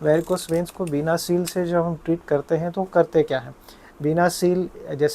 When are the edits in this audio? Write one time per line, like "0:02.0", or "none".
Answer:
none